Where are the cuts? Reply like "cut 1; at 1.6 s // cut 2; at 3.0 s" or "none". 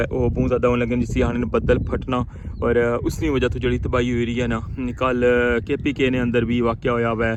none